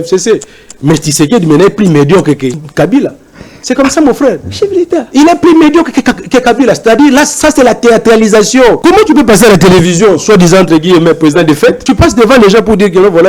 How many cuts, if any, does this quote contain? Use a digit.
3